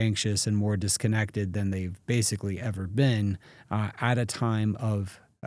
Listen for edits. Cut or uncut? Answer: uncut